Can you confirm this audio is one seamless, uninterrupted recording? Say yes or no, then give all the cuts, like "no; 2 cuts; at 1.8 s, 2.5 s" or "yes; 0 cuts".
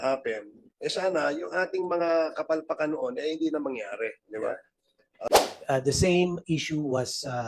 no; 1 cut; at 5.3 s